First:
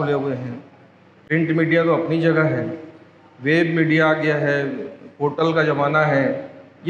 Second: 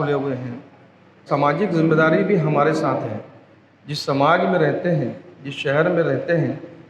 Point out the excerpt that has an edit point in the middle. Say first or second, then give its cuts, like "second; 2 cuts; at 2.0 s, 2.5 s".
second; 1 cut; at 1.2 s